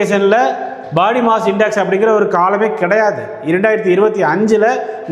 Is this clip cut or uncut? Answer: uncut